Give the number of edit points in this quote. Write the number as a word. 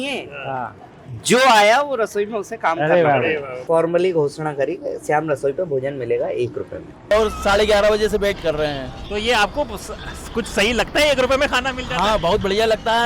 two